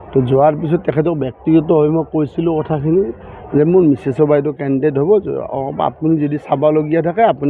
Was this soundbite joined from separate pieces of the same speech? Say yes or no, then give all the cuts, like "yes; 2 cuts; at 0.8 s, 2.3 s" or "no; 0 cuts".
no; 0 cuts